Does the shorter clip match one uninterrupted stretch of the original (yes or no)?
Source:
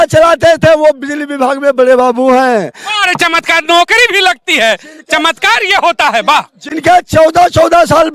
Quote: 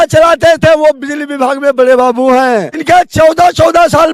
no